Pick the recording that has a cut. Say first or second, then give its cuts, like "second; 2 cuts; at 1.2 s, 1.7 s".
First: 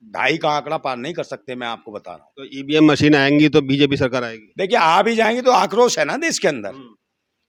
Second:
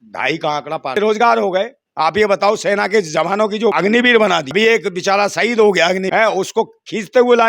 second; 4 cuts; at 1.0 s, 3.7 s, 4.5 s, 6.1 s